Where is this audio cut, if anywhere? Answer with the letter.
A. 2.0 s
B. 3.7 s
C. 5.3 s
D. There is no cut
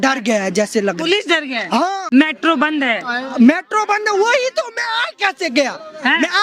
A